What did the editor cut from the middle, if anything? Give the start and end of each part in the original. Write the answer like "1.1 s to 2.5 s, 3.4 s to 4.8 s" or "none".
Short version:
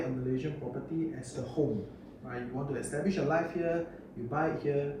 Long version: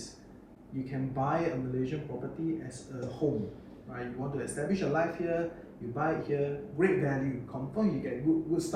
2.8 s to 2.9 s